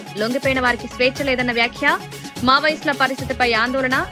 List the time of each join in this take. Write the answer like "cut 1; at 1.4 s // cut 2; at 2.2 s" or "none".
none